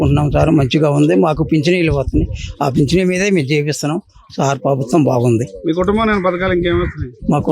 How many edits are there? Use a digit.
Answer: 0